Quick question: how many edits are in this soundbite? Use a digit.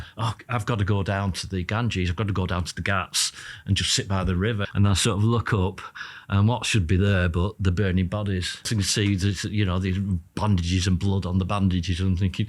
2